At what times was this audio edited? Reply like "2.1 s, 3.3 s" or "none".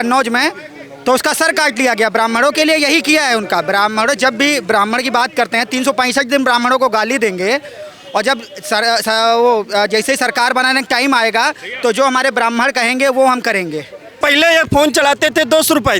14.2 s